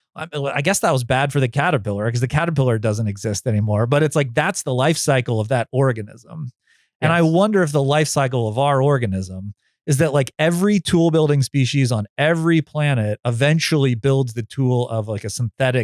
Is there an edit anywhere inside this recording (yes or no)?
no